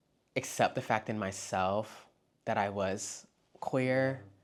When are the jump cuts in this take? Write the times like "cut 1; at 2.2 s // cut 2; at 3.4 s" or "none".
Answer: none